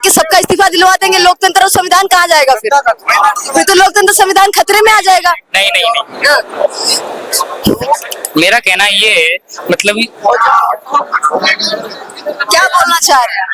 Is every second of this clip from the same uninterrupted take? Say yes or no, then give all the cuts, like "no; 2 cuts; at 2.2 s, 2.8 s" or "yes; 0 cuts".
yes; 0 cuts